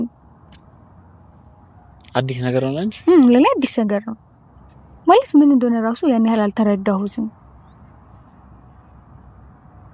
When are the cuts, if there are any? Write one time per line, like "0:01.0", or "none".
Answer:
none